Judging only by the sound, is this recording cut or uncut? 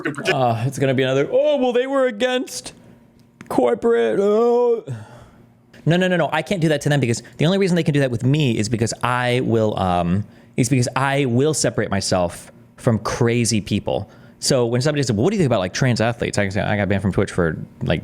cut